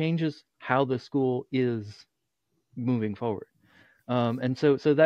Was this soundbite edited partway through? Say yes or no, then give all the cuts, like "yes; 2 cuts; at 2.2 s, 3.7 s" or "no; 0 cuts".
no; 0 cuts